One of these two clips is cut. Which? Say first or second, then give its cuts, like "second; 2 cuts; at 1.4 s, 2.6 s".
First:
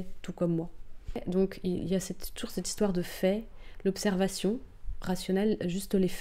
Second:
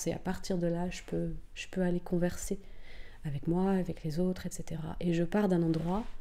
first; 1 cut; at 1.2 s